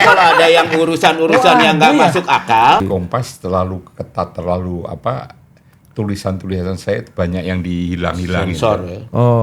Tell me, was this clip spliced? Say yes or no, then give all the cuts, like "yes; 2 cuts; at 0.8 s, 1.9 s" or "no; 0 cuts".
yes; 1 cut; at 2.9 s